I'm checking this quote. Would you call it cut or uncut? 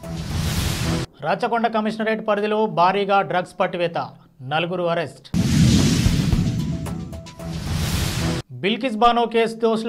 uncut